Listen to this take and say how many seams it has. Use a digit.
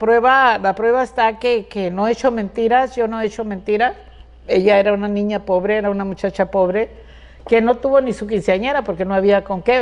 0